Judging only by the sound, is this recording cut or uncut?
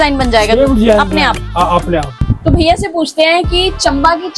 cut